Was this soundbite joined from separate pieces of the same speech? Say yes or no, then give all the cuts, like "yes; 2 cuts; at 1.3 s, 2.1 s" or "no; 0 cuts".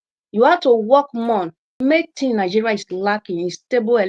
yes; 1 cut; at 1.6 s